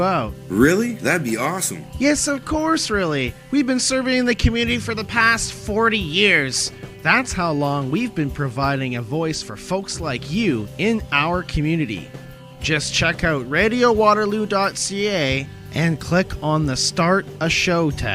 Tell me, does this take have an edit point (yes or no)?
no